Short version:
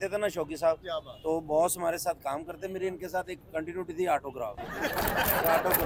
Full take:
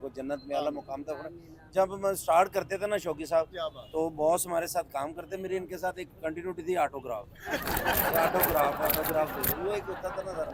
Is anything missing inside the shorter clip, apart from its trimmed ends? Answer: no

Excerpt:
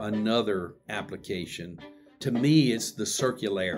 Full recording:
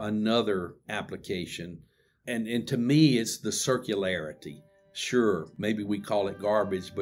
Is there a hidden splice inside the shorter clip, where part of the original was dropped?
yes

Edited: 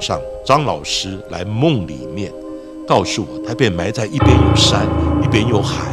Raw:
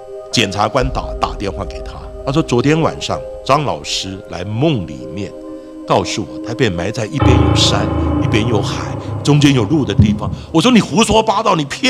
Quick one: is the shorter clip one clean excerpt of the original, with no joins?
yes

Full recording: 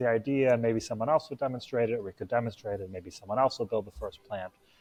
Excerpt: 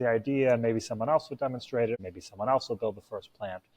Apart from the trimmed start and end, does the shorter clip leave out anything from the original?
yes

